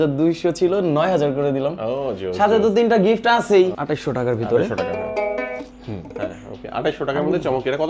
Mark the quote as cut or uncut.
cut